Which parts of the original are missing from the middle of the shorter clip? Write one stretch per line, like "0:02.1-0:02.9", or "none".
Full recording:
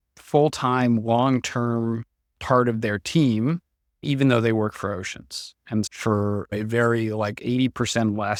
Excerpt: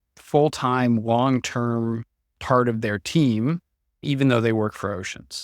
none